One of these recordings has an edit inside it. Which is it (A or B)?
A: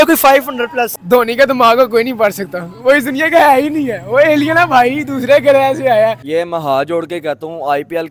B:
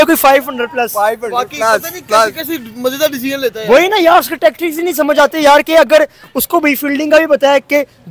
A